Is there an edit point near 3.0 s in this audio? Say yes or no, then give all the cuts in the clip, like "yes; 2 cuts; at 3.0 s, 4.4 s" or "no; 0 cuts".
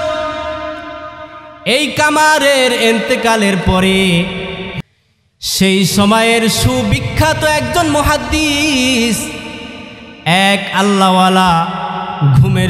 no; 1 cut; at 4.8 s